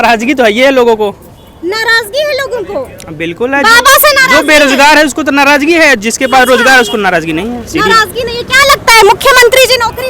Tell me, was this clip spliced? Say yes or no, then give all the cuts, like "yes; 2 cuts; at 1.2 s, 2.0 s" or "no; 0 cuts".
no; 0 cuts